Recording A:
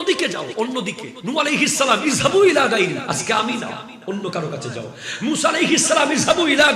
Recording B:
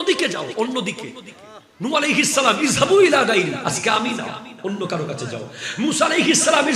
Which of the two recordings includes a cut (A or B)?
A